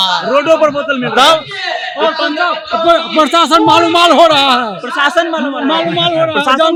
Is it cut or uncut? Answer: uncut